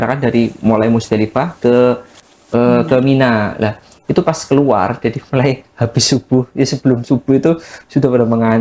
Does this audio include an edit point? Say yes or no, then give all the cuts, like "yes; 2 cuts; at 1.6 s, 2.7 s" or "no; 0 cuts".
no; 0 cuts